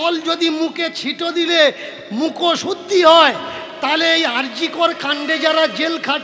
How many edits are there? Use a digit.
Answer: 0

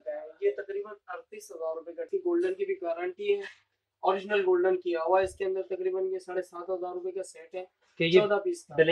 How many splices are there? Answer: 1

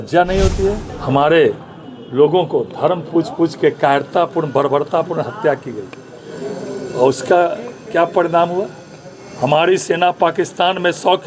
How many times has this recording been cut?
1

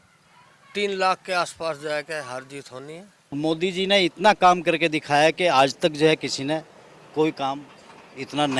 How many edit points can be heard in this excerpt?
1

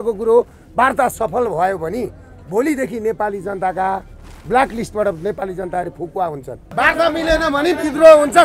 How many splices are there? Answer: 1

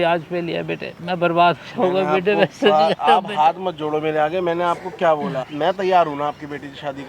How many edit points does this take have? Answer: 2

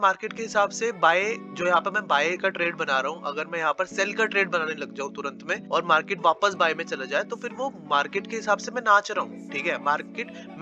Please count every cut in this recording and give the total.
2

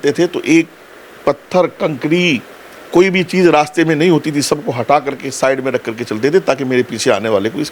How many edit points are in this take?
0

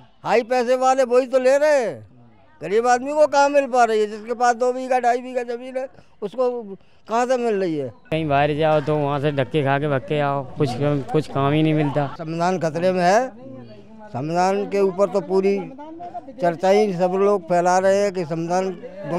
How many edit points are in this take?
2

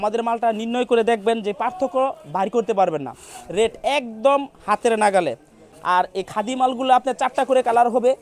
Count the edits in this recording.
0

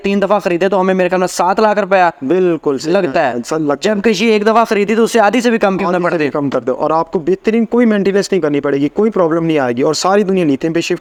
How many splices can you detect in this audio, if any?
0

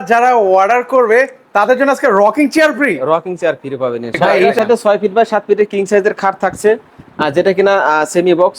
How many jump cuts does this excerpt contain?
1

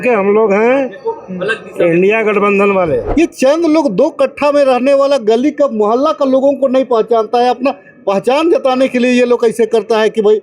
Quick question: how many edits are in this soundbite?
1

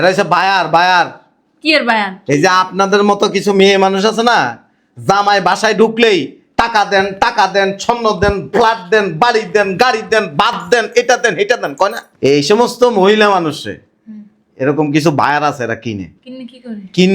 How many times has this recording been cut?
1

